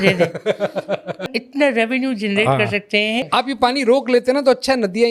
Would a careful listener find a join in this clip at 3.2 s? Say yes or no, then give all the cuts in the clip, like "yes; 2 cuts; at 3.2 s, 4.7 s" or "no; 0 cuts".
yes; 2 cuts; at 1.4 s, 3.2 s